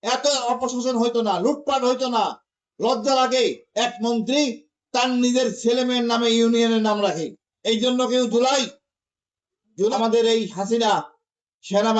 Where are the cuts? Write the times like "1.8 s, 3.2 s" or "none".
9.9 s